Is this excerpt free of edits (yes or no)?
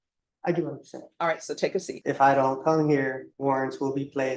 no